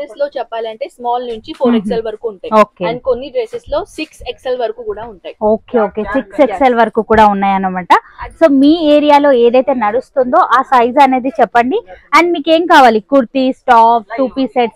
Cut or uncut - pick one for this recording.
uncut